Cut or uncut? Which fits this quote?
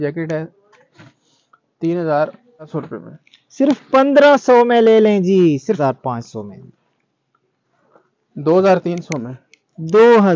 cut